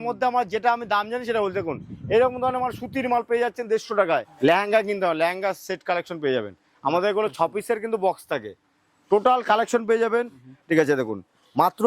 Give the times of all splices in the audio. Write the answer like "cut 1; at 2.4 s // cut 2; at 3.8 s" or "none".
cut 1; at 4.3 s // cut 2; at 10.4 s